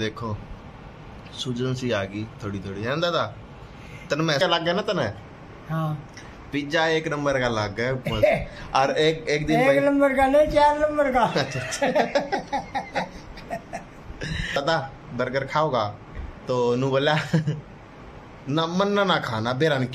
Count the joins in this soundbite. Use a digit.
2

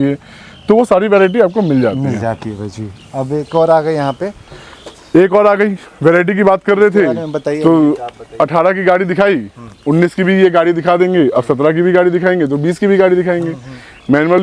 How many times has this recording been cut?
0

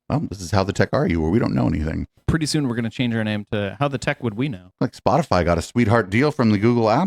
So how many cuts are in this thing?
2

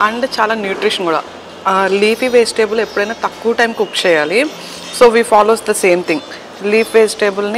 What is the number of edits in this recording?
0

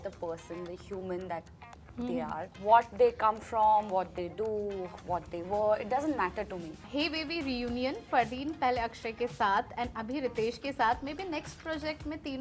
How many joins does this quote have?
2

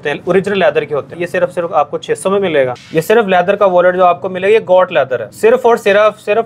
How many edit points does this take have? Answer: 3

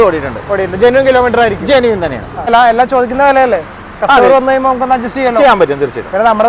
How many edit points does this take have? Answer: 1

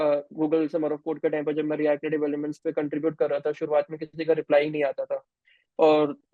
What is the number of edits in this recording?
0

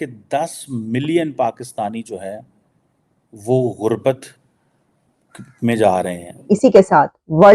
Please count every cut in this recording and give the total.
1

